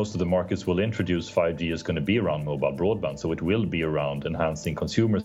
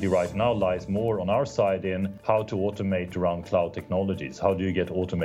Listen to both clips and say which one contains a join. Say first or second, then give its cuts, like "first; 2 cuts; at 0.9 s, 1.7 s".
second; 1 cut; at 2.1 s